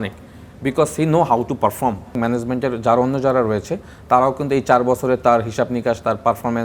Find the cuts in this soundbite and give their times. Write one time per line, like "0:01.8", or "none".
0:02.2